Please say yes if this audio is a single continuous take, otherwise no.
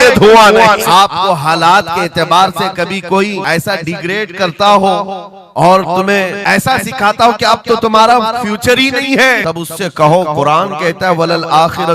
no